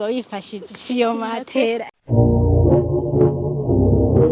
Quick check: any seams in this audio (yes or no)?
yes